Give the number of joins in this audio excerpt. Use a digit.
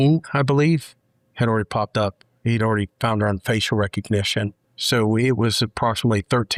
0